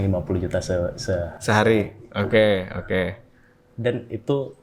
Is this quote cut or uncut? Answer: uncut